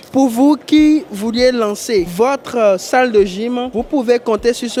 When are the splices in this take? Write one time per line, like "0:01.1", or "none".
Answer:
none